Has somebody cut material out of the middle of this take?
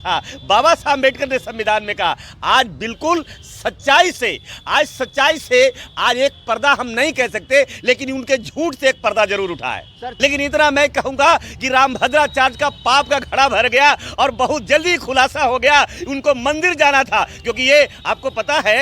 yes; 1 cut; at 10.1 s

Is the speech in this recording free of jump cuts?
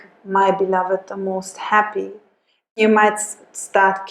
no; 1 cut; at 2.8 s

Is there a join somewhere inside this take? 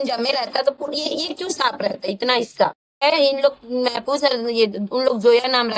yes; 1 cut; at 3.0 s

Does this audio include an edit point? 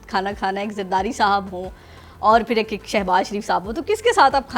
no; 0 cuts

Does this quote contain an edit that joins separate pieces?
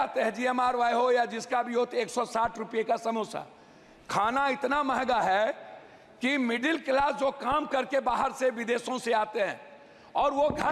no; 0 cuts

